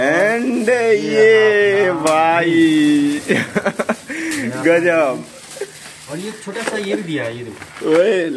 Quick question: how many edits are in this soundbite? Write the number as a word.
zero